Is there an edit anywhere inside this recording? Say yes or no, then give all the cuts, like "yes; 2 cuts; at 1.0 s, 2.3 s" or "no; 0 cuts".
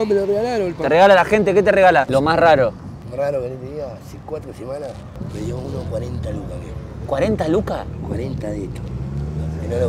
yes; 2 cuts; at 2.1 s, 2.9 s